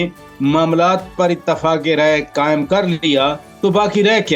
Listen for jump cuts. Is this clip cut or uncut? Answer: uncut